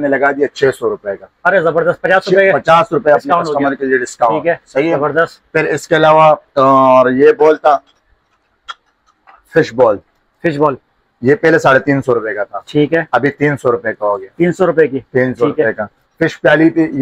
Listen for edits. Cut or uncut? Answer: uncut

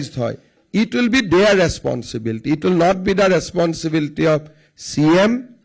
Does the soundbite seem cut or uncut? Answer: uncut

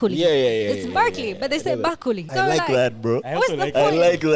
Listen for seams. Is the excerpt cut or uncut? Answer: cut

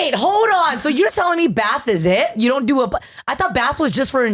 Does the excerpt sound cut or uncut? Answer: uncut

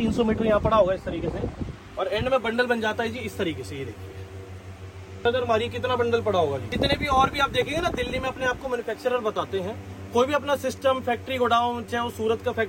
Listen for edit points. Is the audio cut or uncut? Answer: cut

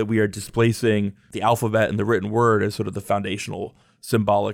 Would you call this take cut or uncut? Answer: cut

